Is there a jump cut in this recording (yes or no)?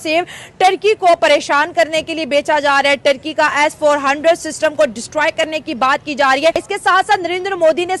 yes